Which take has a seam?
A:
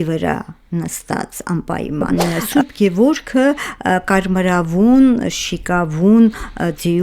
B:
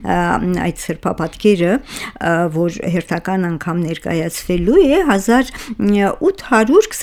A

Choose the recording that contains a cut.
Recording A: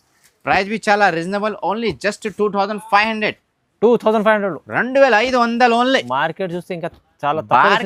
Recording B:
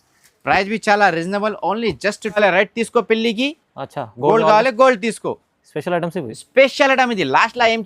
B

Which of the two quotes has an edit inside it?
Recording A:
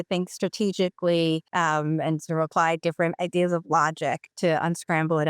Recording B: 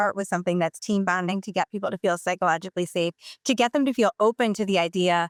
A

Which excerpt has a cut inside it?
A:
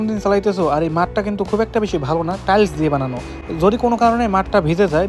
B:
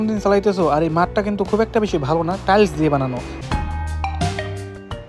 B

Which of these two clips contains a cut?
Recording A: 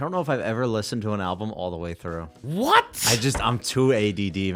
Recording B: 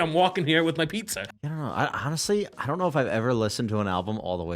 B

